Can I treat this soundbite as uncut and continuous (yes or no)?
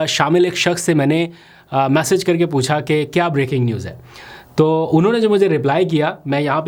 yes